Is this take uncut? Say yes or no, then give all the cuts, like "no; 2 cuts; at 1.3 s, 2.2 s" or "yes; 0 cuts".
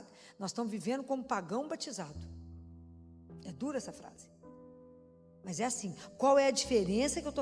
yes; 0 cuts